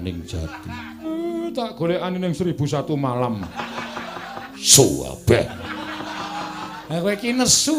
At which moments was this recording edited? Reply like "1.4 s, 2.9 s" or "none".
1.0 s, 4.5 s, 6.8 s